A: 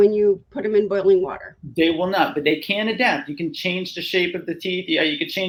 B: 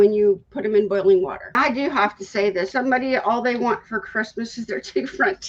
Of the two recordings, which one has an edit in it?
B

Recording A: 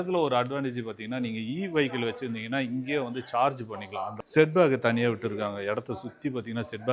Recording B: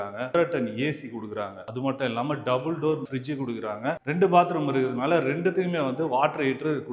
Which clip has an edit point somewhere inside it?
A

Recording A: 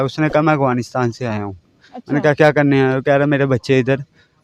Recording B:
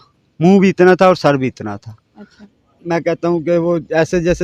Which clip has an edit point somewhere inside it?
B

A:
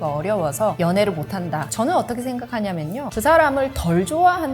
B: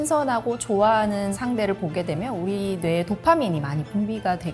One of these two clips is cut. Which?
A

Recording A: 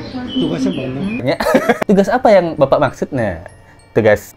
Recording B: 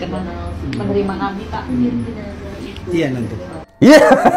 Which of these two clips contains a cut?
A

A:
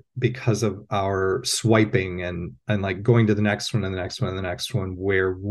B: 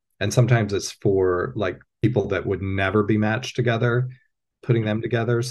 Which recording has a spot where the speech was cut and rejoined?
B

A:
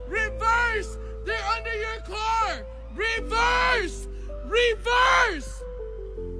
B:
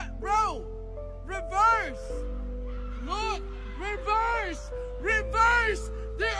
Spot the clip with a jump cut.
A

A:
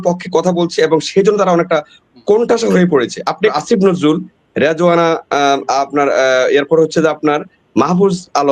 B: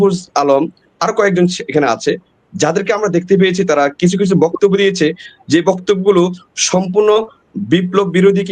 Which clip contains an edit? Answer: A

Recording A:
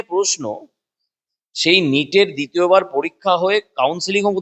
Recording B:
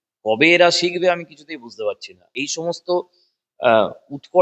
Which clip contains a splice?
B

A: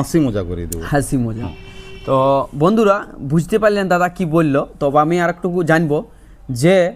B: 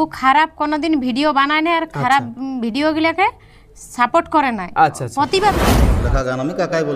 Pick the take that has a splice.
B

